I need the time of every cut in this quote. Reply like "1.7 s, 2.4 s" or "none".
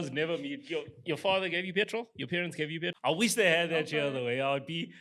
2.9 s